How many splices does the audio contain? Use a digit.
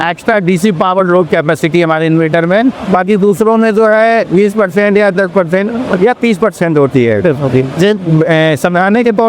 0